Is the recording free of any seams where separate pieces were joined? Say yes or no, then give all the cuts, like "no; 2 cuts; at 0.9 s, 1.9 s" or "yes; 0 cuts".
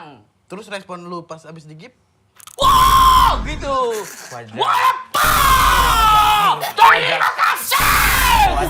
yes; 0 cuts